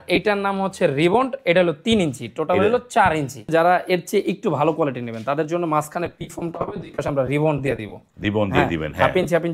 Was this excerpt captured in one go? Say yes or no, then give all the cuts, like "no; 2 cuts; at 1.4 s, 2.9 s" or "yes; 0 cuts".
no; 1 cut; at 3.4 s